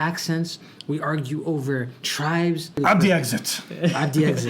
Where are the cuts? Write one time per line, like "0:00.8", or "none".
0:02.8